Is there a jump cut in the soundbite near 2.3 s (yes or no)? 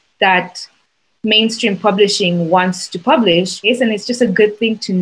no